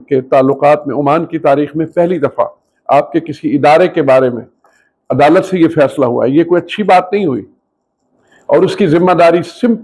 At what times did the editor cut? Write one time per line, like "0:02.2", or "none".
none